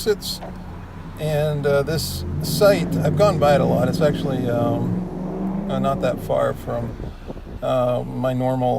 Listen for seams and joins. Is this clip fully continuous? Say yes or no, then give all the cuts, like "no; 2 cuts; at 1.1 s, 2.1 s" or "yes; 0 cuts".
no; 1 cut; at 3.2 s